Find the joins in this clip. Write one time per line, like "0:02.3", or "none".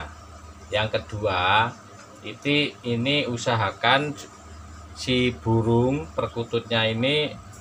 none